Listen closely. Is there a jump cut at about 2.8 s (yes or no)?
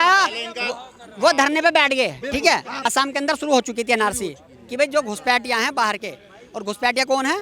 yes